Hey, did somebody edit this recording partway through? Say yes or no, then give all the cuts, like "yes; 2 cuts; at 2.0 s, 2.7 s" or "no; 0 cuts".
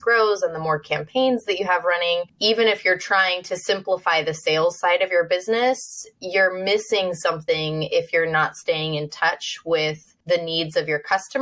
yes; 2 cuts; at 2.3 s, 10.1 s